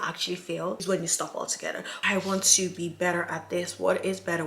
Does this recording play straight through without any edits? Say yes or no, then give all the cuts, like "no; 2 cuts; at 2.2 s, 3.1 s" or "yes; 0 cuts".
no; 2 cuts; at 0.8 s, 1.9 s